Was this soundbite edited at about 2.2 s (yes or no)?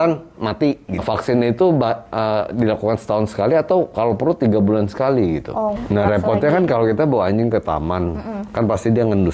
no